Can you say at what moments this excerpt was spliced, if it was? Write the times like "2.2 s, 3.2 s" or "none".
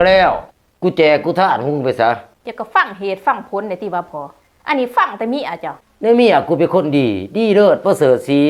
none